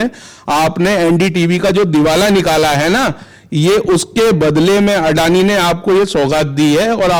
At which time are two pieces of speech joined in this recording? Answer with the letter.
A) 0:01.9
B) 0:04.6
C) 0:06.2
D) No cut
D